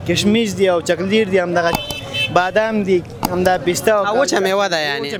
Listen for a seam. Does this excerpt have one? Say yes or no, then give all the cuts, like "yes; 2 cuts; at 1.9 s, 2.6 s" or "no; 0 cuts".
no; 0 cuts